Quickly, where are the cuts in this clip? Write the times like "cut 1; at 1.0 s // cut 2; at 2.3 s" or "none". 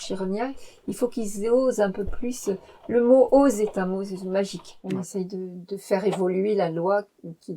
cut 1; at 4.7 s